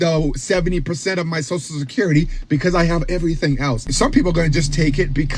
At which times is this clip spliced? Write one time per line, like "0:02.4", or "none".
0:03.9